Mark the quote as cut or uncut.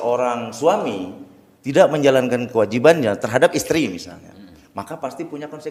uncut